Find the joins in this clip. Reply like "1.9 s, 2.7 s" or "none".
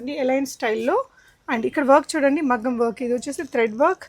none